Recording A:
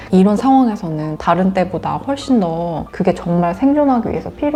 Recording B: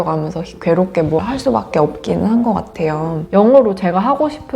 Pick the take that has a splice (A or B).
B